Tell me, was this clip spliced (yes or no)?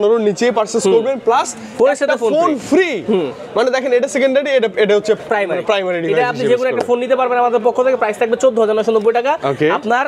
no